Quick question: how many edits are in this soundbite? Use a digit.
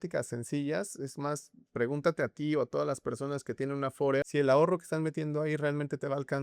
1